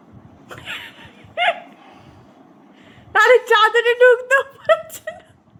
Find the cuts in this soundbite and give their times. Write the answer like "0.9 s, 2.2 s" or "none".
none